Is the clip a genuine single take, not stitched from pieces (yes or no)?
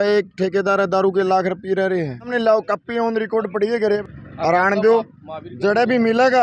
no